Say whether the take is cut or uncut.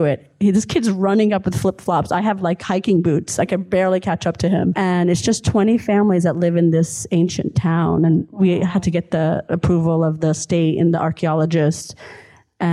cut